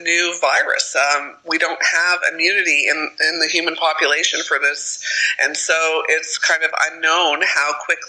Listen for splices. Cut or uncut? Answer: uncut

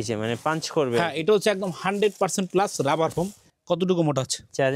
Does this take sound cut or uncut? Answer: cut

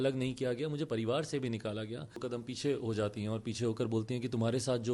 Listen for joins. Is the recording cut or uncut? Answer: cut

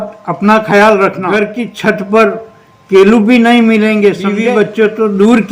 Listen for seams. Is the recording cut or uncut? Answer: cut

